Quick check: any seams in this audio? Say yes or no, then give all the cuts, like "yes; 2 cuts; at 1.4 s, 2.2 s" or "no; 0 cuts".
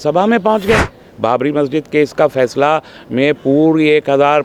no; 0 cuts